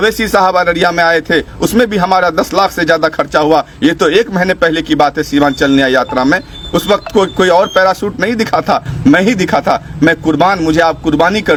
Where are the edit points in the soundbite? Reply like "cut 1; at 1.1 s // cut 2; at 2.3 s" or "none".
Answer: none